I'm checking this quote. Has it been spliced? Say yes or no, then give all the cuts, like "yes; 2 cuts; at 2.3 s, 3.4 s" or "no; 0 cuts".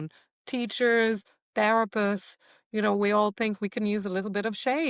no; 0 cuts